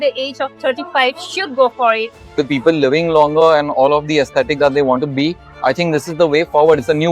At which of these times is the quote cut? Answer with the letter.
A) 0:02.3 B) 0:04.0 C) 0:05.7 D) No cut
A